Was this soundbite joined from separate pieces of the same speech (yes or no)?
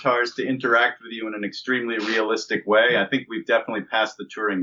no